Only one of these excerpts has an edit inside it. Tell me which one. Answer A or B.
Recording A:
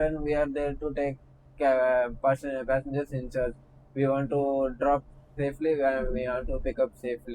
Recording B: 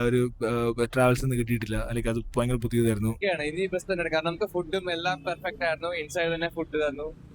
B